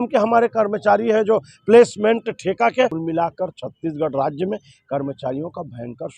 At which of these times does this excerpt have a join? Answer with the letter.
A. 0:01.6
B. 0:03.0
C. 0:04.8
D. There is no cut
B